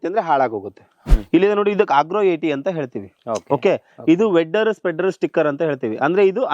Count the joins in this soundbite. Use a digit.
1